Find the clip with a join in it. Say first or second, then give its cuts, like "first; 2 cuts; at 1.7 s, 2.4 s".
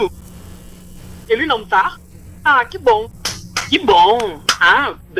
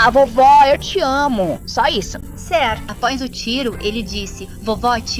second; 1 cut; at 2.9 s